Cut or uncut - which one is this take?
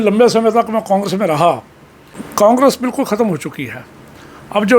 cut